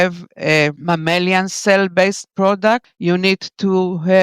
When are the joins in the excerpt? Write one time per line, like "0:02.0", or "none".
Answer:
0:02.9